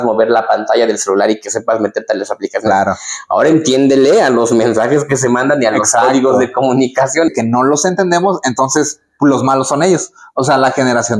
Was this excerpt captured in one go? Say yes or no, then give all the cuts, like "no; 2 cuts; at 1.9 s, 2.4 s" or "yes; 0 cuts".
no; 1 cut; at 7.3 s